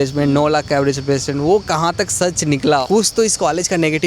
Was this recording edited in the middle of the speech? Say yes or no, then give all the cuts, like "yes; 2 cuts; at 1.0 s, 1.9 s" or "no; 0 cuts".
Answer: yes; 1 cut; at 2.8 s